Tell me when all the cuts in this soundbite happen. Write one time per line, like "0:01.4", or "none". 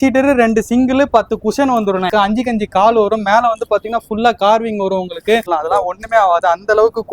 0:02.1
0:05.4